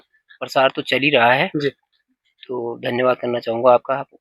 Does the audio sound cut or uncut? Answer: uncut